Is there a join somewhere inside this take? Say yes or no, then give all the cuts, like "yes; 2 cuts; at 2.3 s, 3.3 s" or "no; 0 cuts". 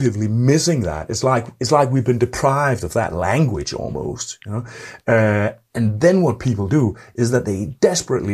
no; 0 cuts